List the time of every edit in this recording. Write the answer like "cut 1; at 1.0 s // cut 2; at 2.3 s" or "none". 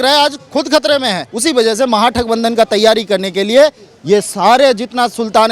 cut 1; at 1.3 s